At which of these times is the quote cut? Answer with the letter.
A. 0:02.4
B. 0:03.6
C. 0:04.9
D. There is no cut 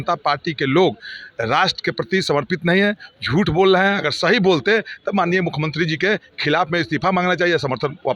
D